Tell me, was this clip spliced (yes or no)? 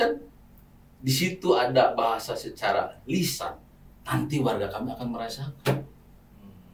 no